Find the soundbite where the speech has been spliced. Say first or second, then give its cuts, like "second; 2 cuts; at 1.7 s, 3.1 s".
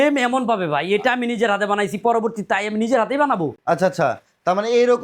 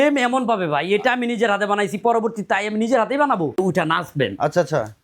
second; 1 cut; at 3.6 s